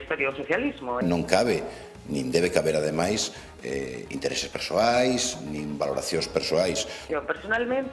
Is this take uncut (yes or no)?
no